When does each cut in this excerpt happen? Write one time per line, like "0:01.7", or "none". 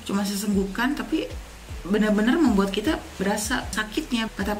none